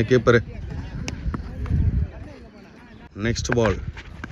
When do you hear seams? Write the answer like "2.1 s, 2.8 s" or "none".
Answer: 3.0 s